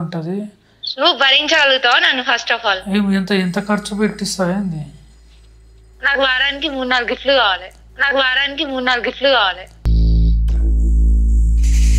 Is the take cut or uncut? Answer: uncut